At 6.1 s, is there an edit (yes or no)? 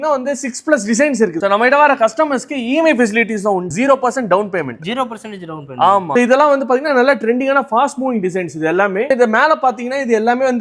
yes